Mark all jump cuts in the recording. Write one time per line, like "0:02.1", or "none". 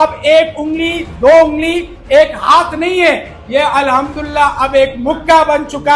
none